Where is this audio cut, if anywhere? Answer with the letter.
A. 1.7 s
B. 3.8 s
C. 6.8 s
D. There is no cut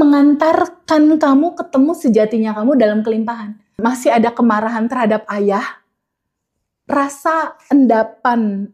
B